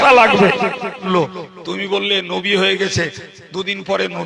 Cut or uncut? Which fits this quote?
cut